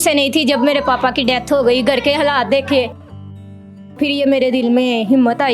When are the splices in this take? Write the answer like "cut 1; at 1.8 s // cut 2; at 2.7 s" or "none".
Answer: cut 1; at 3.9 s